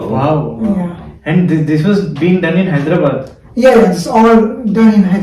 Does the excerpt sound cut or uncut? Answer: uncut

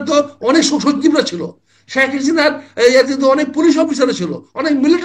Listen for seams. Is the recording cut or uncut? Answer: uncut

